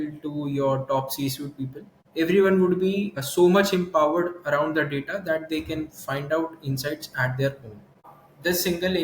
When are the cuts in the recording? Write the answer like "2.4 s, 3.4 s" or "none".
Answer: 8.1 s